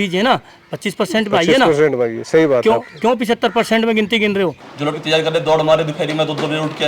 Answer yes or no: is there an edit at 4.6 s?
yes